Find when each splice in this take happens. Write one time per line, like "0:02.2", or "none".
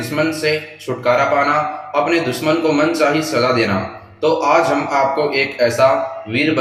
none